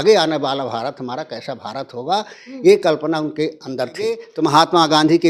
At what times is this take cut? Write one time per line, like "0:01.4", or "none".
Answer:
0:04.3